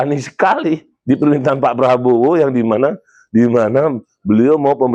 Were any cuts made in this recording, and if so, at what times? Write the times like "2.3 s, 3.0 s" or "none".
none